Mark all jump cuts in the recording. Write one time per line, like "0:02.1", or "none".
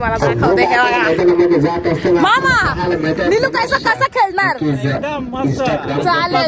none

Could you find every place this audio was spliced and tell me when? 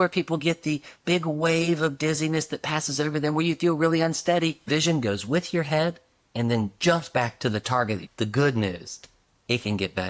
0:04.7
0:08.0

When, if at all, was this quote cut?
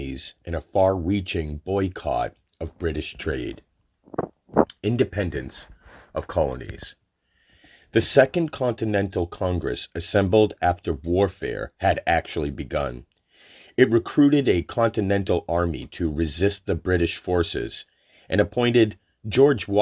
none

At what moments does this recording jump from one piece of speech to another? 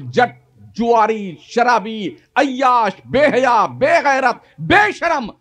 none

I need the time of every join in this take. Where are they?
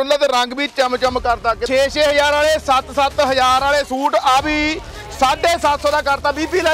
0:01.6

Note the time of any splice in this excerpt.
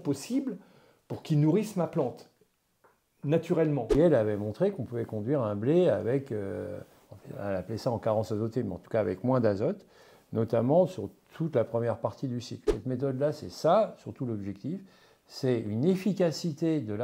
0:03.9
0:12.7

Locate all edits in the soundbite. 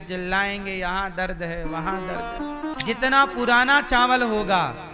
0:02.8

